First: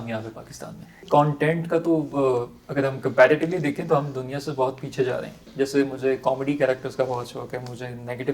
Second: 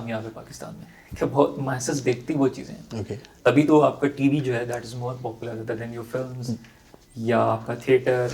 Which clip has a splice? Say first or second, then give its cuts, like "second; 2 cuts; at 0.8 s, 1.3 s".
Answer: first; 2 cuts; at 1.0 s, 5.4 s